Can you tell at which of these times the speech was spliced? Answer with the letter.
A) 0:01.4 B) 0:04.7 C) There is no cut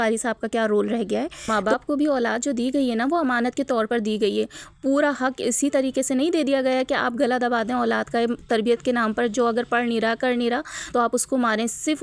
A